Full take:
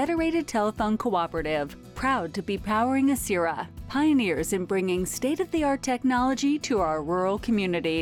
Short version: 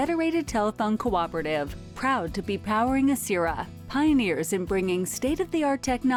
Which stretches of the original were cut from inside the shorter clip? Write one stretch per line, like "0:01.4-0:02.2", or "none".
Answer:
none